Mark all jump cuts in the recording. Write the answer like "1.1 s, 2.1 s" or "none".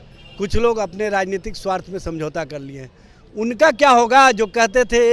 none